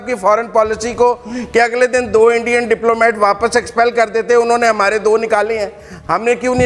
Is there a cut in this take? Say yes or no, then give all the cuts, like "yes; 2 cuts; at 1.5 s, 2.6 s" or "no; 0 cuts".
no; 0 cuts